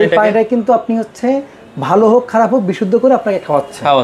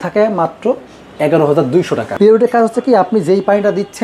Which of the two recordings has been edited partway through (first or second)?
second